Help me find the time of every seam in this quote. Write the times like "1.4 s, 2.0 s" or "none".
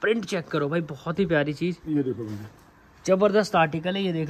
none